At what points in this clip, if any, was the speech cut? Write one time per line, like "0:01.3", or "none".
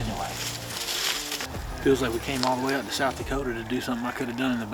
none